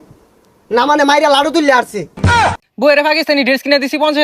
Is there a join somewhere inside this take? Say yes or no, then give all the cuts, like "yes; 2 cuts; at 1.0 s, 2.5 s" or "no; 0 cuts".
yes; 1 cut; at 2.3 s